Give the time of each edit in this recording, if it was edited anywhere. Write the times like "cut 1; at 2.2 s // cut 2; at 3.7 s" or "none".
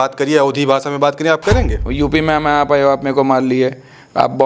cut 1; at 1.9 s